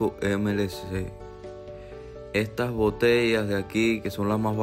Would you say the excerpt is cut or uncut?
uncut